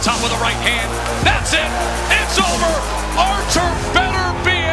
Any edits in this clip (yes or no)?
no